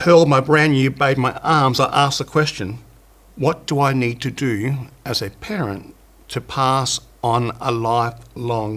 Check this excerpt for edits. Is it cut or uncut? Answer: uncut